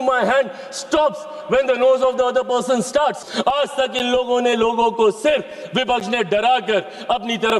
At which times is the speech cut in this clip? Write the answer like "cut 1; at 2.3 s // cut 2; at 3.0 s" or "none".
cut 1; at 3.3 s

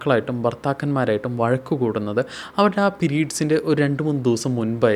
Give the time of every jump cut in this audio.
none

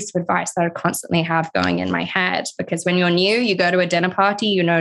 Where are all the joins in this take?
none

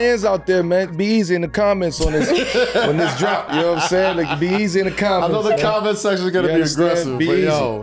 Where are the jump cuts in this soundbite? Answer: cut 1; at 1.0 s

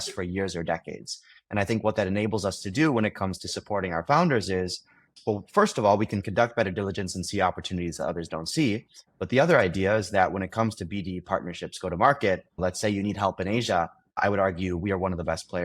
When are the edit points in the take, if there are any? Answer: cut 1; at 14.2 s

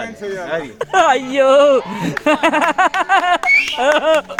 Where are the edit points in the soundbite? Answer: none

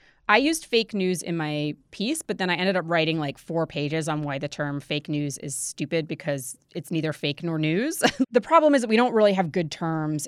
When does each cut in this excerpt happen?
cut 1; at 8.2 s

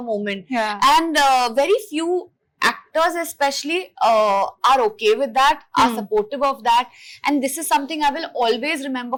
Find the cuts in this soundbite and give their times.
none

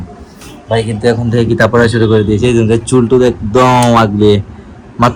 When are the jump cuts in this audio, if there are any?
none

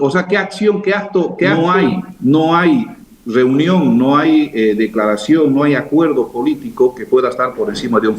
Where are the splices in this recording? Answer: cut 1; at 1.5 s

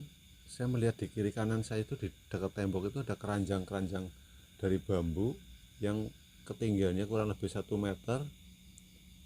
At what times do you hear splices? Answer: none

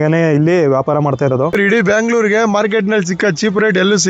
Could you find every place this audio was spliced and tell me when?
cut 1; at 1.6 s

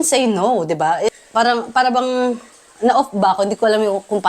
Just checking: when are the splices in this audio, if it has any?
cut 1; at 1.1 s

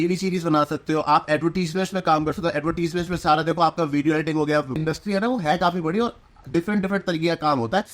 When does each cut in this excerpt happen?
cut 1; at 4.8 s

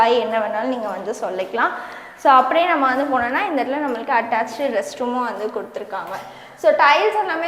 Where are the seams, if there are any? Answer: none

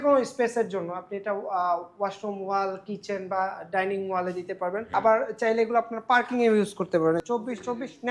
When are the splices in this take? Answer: cut 1; at 4.9 s // cut 2; at 7.2 s

